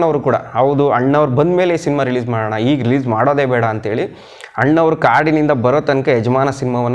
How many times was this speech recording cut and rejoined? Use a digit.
0